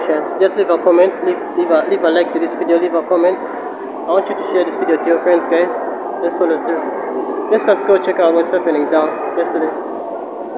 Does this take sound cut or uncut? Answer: uncut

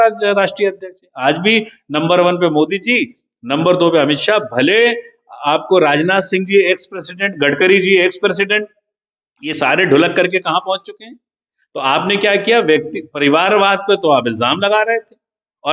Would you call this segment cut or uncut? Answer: uncut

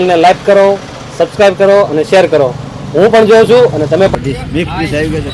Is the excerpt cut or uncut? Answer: cut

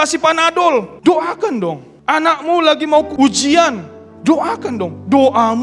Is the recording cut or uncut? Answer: cut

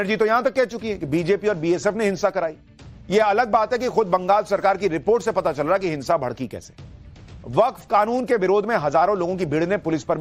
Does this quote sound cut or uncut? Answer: uncut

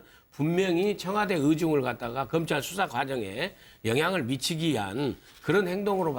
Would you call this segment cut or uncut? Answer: uncut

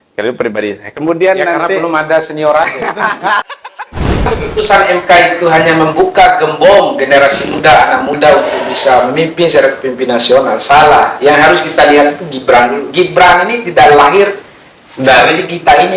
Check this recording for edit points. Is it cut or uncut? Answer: cut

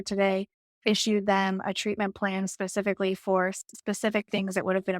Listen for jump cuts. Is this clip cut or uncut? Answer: uncut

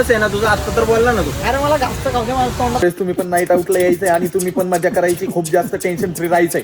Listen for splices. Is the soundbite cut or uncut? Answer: cut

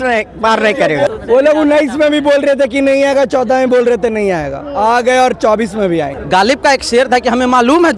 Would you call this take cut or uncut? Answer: cut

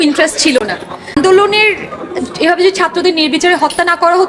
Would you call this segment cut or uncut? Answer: cut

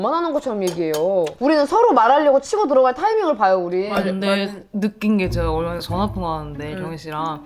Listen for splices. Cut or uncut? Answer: cut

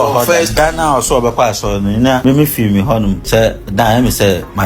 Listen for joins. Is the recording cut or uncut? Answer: cut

